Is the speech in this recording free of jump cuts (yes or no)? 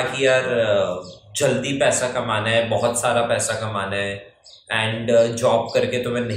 yes